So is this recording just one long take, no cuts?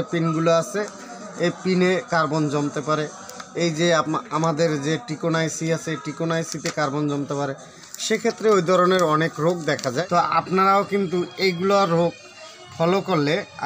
no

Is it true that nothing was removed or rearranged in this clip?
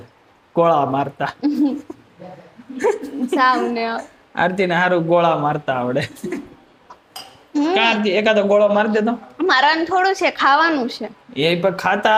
yes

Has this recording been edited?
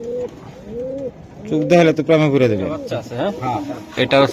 yes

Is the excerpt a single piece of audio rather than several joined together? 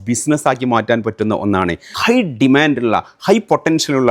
no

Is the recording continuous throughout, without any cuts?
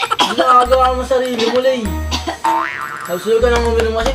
yes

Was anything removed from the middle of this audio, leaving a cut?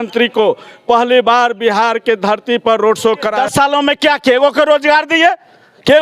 yes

